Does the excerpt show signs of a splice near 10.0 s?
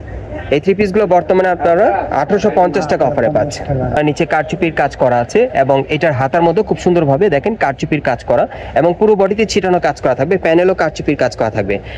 no; 1 cut; at 4.0 s

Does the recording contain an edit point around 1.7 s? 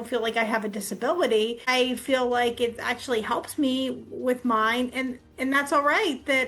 yes; 1 cut; at 1.7 s

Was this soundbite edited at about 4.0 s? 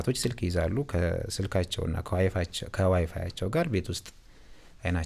no; 0 cuts

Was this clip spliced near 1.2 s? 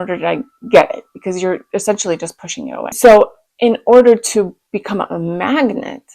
no; 1 cut; at 2.8 s

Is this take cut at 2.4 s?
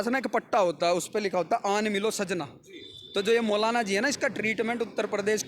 no; 0 cuts

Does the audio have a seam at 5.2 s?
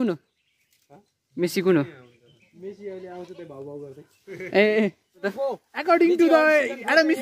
yes; 1 cut; at 5.2 s

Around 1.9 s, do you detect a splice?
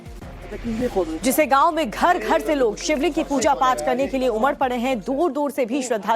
yes; 1 cut; at 1.9 s

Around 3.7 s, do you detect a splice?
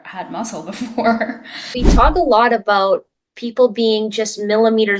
no; 1 cut; at 1.8 s

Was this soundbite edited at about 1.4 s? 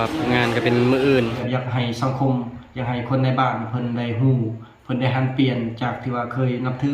yes; 1 cut; at 1.4 s

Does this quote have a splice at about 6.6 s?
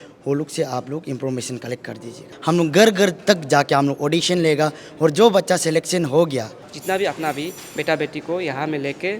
yes; 2 cuts; at 2.3 s, 6.6 s

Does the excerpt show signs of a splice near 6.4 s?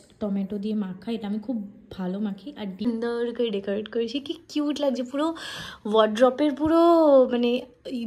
no; 1 cut; at 2.9 s

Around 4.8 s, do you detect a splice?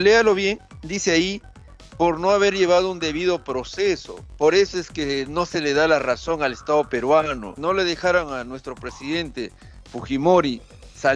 no; 1 cut; at 7.5 s

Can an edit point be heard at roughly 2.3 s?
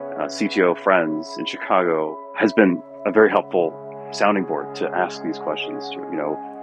yes; 1 cut; at 2.3 s

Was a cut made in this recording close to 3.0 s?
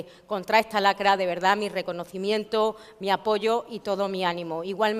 yes; 1 cut; at 3.0 s

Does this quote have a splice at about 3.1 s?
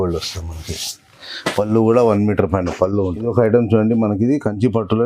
yes; 1 cut; at 3.1 s

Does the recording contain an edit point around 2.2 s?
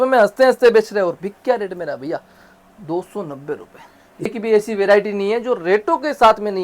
no; 1 cut; at 4.3 s

